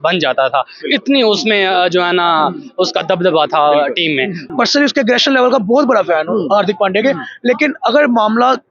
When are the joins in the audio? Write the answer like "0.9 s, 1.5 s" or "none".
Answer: 4.5 s